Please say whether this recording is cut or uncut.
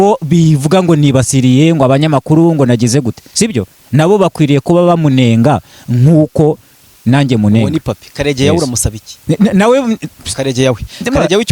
uncut